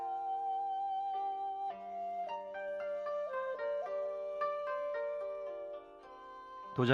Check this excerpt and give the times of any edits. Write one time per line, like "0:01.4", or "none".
0:01.3